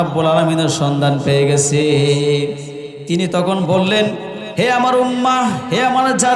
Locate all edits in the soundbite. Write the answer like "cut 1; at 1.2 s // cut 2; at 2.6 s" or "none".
none